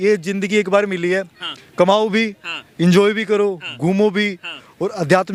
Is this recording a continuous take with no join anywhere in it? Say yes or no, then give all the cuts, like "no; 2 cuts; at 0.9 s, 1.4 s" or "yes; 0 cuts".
yes; 0 cuts